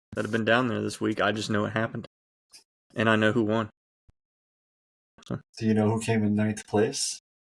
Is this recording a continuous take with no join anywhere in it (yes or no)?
yes